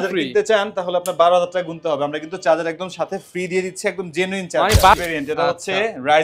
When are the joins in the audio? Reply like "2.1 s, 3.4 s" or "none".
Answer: 4.9 s